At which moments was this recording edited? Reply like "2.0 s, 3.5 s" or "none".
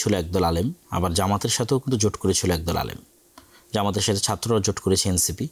none